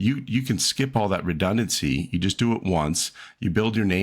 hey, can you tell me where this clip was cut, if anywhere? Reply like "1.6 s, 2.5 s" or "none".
none